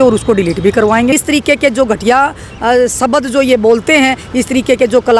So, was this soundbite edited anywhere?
yes; 1 cut; at 1.1 s

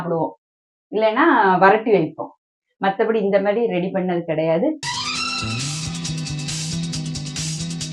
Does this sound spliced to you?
yes; 1 cut; at 4.8 s

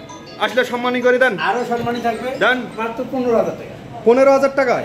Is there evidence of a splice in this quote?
yes; 1 cut; at 2.7 s

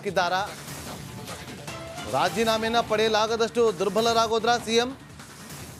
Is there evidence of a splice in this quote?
no; 0 cuts

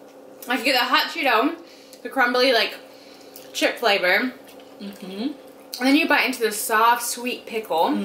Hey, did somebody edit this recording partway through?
no; 0 cuts

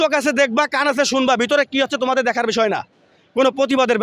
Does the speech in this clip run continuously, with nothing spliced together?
yes; 0 cuts

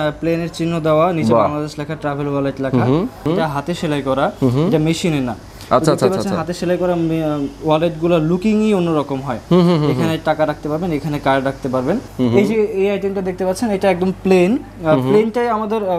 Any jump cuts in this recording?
yes; 2 cuts; at 3.2 s, 12.1 s

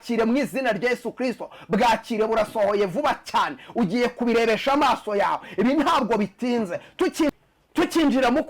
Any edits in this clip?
no; 0 cuts

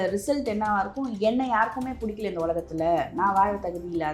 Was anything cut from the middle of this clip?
no; 0 cuts

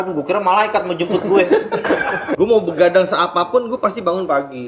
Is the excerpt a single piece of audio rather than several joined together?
no; 1 cut; at 2.3 s

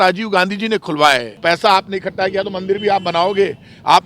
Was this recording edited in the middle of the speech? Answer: yes; 1 cut; at 1.3 s

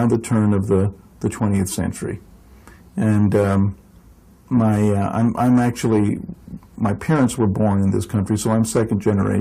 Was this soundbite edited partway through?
yes; 1 cut; at 2.2 s

